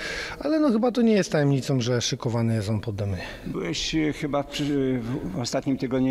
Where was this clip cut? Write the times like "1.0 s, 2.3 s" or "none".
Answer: none

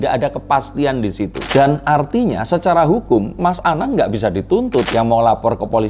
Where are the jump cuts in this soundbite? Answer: 1.4 s, 4.9 s

